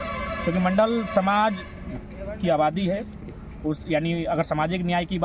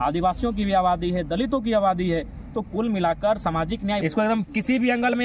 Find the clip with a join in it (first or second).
second